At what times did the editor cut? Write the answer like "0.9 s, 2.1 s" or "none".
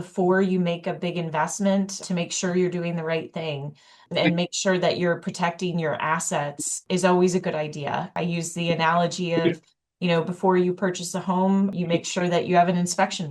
2.0 s, 6.8 s, 8.2 s, 11.7 s